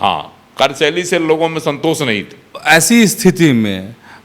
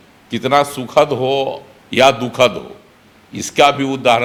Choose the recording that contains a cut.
first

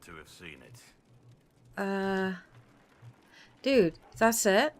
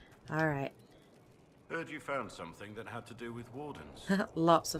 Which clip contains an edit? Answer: first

